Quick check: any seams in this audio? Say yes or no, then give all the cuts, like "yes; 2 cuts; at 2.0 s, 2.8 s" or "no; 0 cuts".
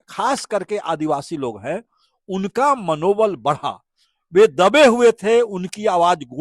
no; 0 cuts